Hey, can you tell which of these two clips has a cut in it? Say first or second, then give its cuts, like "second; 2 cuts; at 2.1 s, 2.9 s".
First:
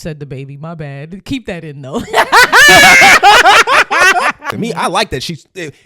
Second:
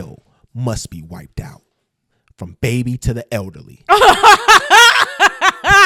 first; 1 cut; at 4.4 s